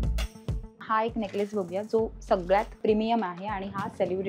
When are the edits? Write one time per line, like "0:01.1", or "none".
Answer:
0:00.8
0:02.7